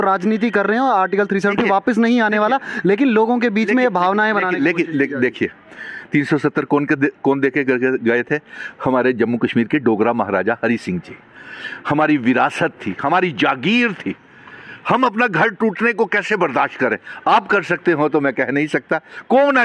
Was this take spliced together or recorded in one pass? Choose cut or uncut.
uncut